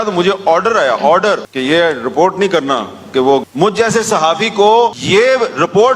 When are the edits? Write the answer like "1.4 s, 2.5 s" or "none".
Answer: 3.5 s